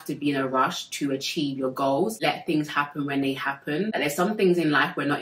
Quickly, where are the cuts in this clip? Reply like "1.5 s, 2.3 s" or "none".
2.2 s, 3.9 s